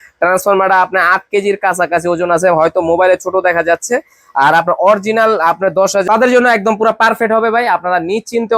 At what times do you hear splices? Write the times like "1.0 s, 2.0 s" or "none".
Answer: 6.0 s